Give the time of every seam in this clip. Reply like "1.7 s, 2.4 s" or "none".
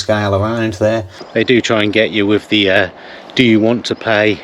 1.2 s